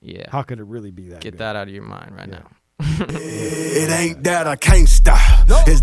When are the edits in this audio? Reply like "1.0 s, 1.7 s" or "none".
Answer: 3.2 s